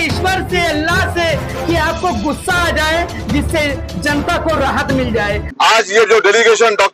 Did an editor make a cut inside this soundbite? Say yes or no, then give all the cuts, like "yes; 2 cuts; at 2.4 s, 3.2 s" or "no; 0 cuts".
yes; 1 cut; at 5.4 s